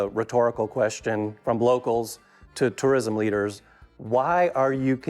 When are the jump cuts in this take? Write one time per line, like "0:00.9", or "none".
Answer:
0:01.4